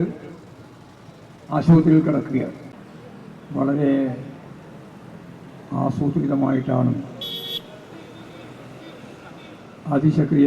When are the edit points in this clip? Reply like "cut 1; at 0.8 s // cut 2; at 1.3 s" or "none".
cut 1; at 3.4 s